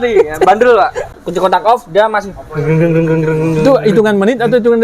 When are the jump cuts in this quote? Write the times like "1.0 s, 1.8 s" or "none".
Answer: 1.1 s